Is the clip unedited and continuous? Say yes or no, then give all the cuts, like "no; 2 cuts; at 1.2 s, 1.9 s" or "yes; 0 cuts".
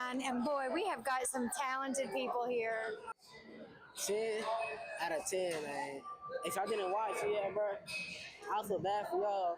no; 1 cut; at 3.1 s